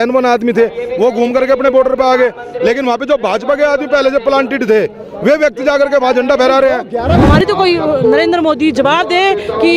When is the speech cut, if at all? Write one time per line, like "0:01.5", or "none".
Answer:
0:07.2